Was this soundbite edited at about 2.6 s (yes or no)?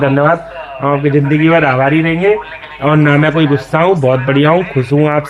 yes